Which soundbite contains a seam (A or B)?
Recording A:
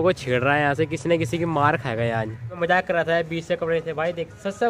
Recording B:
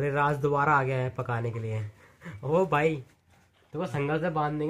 A